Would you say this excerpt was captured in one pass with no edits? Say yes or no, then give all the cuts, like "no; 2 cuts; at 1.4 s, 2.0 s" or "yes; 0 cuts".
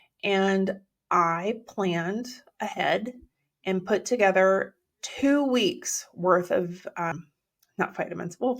no; 1 cut; at 7.1 s